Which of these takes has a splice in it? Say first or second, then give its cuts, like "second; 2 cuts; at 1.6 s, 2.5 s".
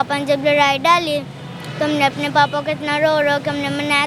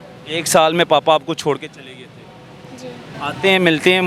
second; 1 cut; at 3.1 s